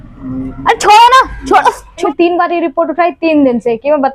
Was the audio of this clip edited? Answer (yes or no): yes